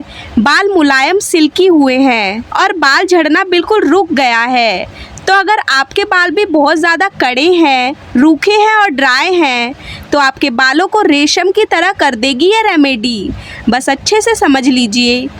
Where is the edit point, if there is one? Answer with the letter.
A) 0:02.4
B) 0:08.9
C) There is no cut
A